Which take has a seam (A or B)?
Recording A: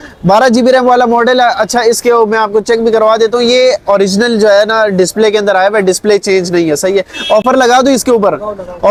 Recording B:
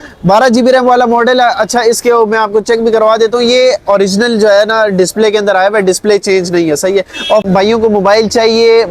B